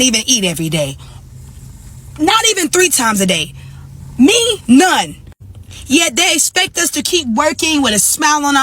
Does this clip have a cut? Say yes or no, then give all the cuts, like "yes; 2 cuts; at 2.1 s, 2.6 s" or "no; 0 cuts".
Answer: no; 0 cuts